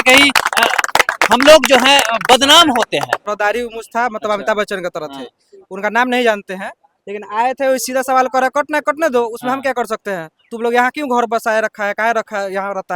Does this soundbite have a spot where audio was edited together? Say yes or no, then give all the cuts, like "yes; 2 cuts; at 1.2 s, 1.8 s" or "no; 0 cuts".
yes; 1 cut; at 3.2 s